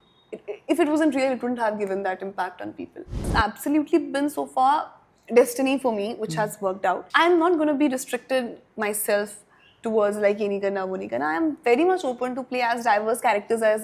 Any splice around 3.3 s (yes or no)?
yes